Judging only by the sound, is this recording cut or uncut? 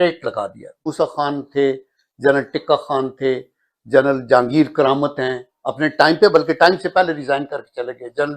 cut